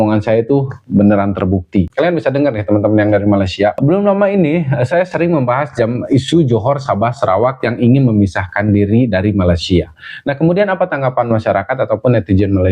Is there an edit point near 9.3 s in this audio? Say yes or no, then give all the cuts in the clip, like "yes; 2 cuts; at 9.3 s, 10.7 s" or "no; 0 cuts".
no; 2 cuts; at 1.9 s, 3.8 s